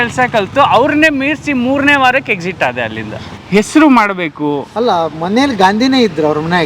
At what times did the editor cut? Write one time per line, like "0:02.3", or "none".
0:03.2